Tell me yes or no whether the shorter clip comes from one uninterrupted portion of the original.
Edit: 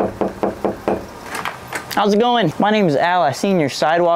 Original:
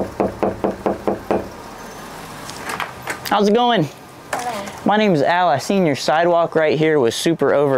no